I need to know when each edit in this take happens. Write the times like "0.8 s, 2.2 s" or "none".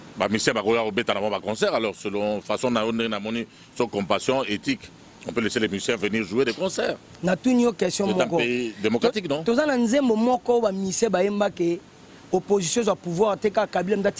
none